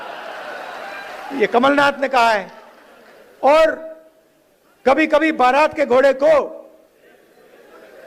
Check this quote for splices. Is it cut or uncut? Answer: uncut